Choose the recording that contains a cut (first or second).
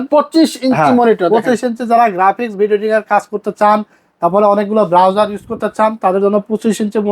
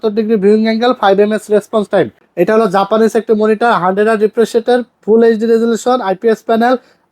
second